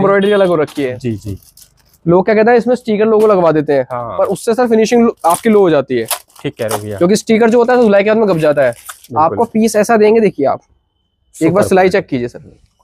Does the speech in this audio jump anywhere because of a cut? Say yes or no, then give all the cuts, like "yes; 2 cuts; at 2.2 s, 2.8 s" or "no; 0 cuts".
no; 0 cuts